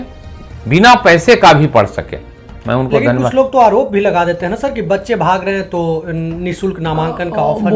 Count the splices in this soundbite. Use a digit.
1